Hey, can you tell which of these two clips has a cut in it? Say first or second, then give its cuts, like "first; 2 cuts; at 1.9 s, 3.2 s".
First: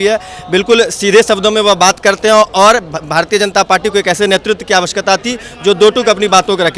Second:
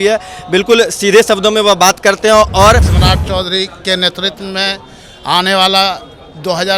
second; 1 cut; at 2.9 s